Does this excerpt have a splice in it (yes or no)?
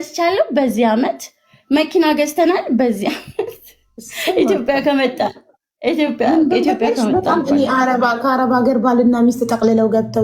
no